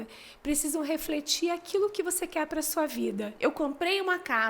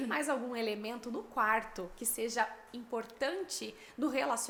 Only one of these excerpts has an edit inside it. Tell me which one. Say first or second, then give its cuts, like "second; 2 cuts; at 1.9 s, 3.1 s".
first; 1 cut; at 3.3 s